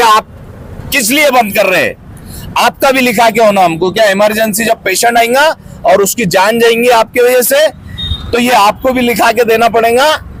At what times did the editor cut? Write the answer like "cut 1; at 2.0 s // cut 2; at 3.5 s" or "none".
none